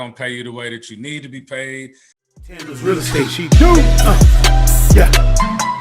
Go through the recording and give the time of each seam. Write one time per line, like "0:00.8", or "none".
0:02.2